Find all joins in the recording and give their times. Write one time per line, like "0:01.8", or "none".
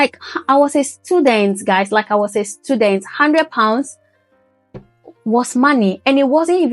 none